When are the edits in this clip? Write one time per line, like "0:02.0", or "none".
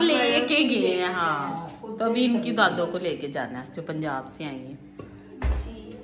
none